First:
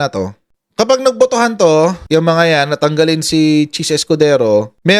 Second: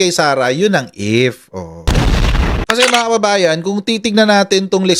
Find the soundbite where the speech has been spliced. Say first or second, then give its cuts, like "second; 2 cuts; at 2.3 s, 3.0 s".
second; 1 cut; at 2.9 s